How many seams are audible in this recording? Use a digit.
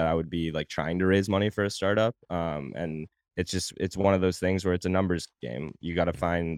0